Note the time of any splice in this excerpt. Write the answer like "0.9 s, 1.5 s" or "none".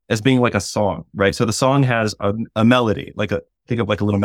none